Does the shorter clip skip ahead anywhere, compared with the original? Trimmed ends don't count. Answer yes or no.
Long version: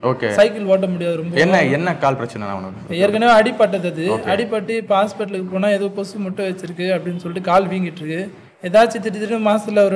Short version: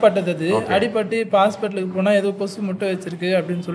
no